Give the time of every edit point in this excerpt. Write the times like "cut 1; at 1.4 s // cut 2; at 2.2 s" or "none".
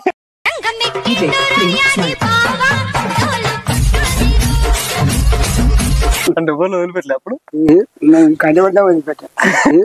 cut 1; at 6.3 s